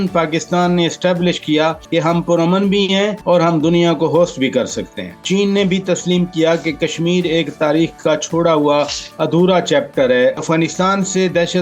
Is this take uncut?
no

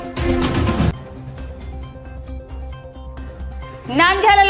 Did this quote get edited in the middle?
yes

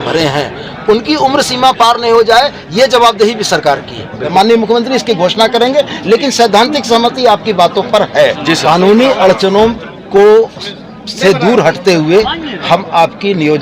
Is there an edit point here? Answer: yes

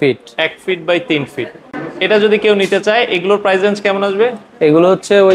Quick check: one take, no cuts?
yes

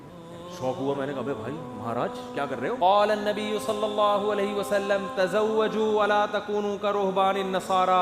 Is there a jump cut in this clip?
yes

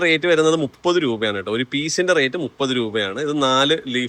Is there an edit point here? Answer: no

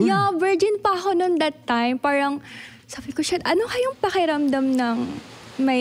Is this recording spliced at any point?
no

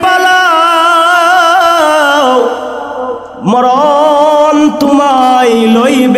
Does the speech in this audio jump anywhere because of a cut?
no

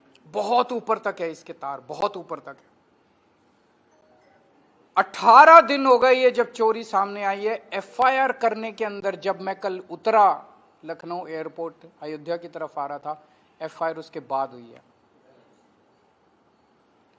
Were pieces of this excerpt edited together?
no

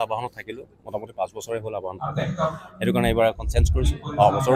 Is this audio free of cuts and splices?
yes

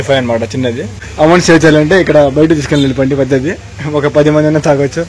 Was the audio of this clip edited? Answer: yes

